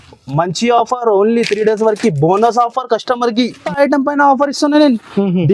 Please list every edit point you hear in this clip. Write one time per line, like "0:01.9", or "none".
0:03.6

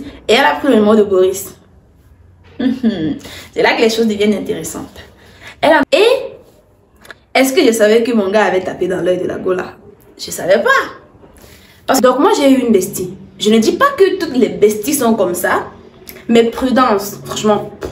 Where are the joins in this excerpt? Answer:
0:05.8
0:12.0

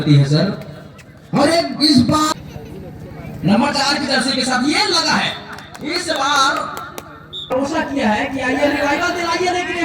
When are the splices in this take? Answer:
0:02.3
0:07.5

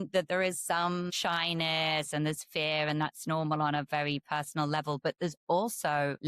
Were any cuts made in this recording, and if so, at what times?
0:01.1

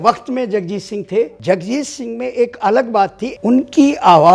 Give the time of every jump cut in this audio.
0:01.4
0:03.2

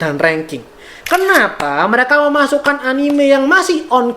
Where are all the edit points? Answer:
0:00.9

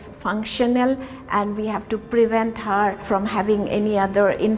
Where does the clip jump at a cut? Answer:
0:03.0

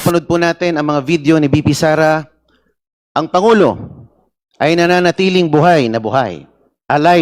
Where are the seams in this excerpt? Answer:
none

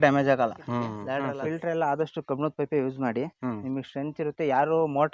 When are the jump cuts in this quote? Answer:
0:00.9

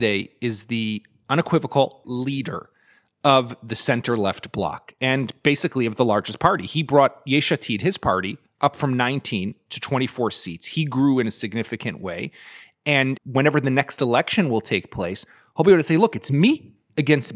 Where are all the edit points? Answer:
0:02.0
0:13.2

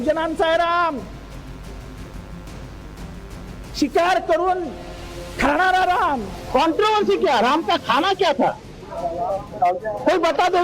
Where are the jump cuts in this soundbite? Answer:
0:06.5

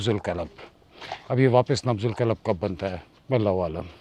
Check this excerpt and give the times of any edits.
0:03.1

